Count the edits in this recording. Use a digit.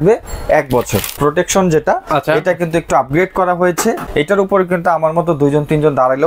2